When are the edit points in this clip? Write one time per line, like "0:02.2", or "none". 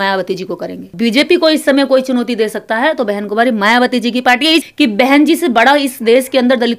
0:00.9
0:04.6